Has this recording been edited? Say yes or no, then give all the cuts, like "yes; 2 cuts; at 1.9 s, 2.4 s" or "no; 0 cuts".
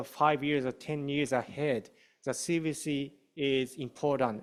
no; 0 cuts